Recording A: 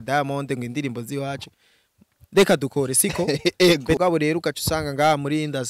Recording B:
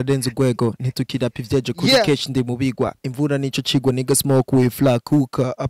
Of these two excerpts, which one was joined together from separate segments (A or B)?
A